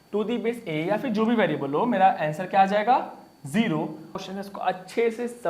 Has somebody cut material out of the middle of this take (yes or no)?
yes